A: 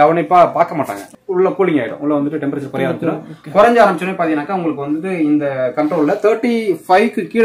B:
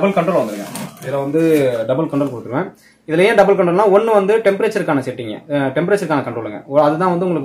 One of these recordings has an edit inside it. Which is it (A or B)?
A